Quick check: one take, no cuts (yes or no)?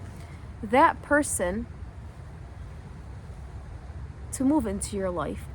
yes